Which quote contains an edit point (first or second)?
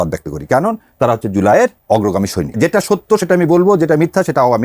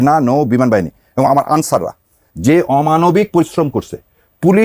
first